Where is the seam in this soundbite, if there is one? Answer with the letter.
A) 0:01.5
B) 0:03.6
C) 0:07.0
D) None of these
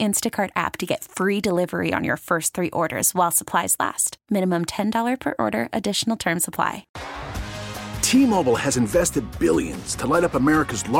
C